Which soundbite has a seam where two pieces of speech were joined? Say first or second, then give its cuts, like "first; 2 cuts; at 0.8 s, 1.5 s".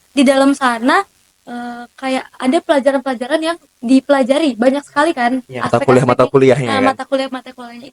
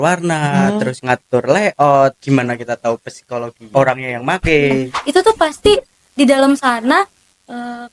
second; 4 cuts; at 1.0 s, 2.2 s, 3.6 s, 5.0 s